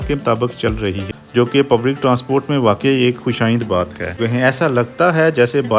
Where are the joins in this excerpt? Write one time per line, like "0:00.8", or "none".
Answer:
0:01.1
0:04.1